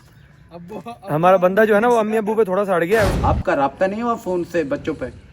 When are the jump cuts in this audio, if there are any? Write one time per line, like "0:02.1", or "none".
0:03.1

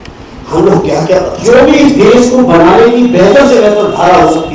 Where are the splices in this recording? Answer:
0:01.4

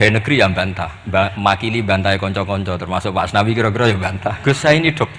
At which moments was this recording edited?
0:00.9
0:04.4

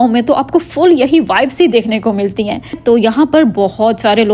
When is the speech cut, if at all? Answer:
0:02.8

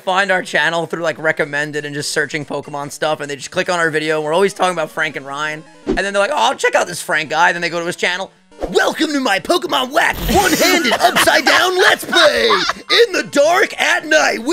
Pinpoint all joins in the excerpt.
none

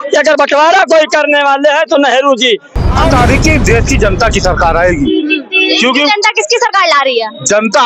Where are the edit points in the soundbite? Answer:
0:03.0

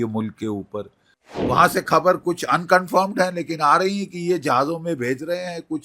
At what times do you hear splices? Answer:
0:01.4

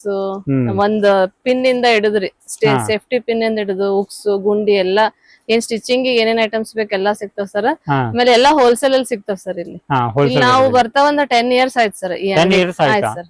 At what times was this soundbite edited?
none

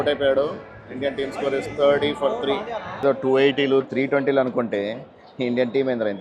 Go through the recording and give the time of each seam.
0:02.9

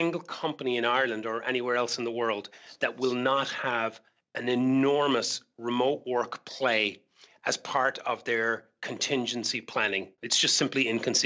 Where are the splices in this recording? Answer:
0:10.2

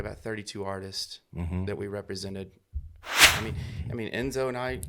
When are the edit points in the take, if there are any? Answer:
0:03.2

